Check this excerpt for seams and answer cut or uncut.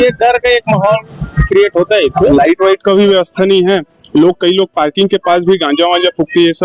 cut